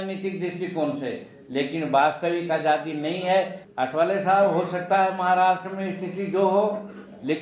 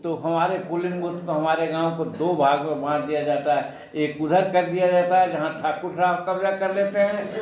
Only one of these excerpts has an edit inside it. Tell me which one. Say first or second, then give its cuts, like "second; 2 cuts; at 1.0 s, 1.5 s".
first; 1 cut; at 3.6 s